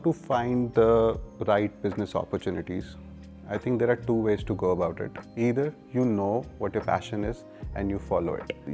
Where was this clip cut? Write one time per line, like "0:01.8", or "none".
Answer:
none